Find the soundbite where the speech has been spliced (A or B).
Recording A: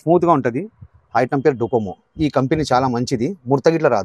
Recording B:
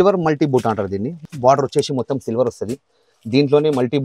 B